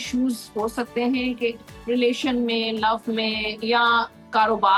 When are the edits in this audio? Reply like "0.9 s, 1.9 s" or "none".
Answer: none